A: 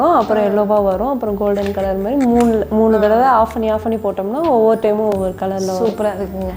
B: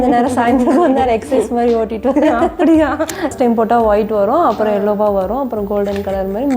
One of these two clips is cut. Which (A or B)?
B